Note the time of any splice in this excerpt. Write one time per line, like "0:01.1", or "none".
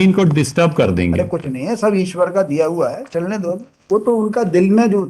0:03.8